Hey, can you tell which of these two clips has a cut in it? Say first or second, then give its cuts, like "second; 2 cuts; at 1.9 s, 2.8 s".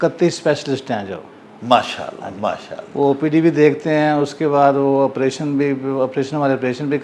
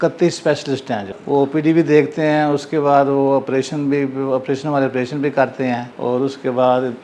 second; 2 cuts; at 1.1 s, 5.9 s